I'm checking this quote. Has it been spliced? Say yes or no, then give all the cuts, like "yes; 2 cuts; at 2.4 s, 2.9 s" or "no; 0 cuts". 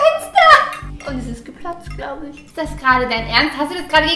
no; 0 cuts